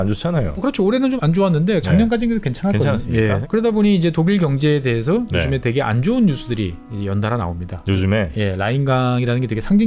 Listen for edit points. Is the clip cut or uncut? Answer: cut